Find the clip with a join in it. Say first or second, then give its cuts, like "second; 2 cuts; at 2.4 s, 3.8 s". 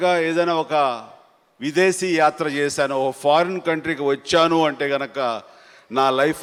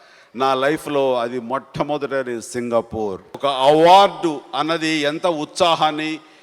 second; 1 cut; at 3.3 s